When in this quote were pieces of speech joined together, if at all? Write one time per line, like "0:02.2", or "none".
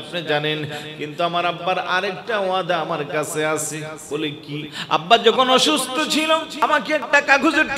0:04.3
0:06.5